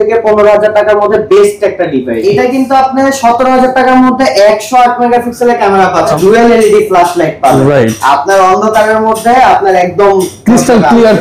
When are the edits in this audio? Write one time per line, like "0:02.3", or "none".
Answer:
0:02.2
0:06.1